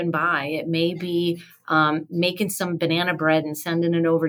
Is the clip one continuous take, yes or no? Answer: yes